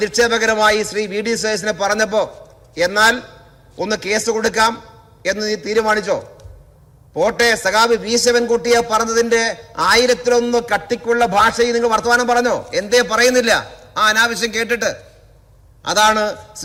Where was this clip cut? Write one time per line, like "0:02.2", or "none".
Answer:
none